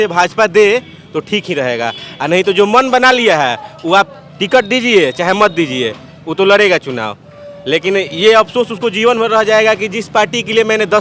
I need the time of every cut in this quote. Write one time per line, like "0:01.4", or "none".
none